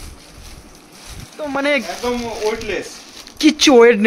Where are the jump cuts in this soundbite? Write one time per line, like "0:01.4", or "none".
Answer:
0:01.4